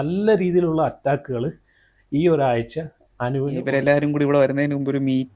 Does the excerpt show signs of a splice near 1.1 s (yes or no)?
no